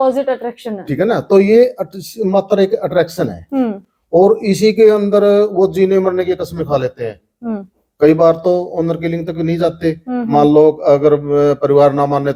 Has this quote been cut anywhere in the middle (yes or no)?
no